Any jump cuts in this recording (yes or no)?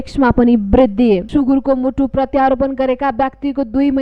yes